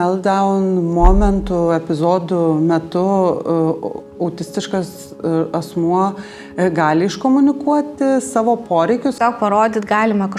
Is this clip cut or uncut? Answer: cut